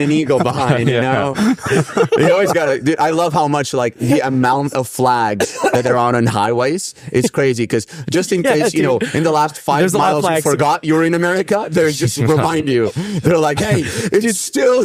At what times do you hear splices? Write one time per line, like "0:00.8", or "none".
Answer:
none